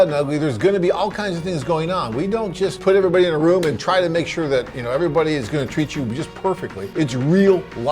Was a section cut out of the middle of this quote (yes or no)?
yes